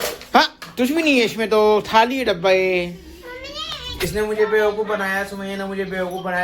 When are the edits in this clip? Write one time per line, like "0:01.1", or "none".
none